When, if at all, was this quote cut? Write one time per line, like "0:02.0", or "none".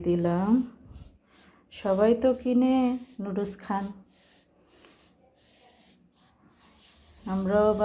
none